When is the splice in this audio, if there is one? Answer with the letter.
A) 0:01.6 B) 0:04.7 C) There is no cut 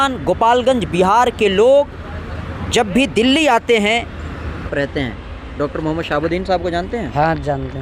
B